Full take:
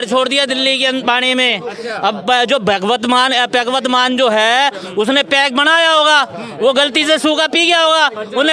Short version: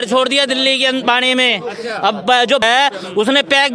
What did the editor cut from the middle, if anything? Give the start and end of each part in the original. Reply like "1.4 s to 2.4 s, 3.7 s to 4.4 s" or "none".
2.6 s to 4.4 s